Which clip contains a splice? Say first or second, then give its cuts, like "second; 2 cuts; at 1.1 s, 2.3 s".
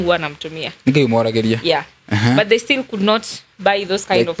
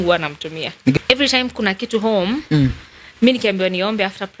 second; 1 cut; at 1.0 s